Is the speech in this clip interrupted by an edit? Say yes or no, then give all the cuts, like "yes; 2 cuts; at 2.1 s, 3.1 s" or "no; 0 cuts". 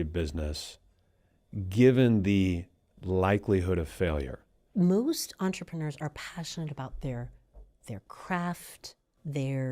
yes; 1 cut; at 4.6 s